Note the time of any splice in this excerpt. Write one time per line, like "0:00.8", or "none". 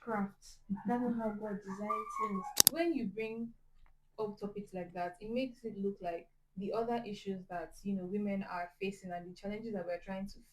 0:02.6